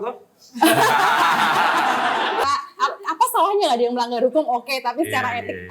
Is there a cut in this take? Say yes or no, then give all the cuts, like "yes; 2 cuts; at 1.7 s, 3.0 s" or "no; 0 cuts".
yes; 1 cut; at 2.4 s